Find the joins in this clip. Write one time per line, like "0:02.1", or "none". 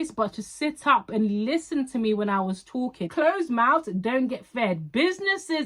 0:03.0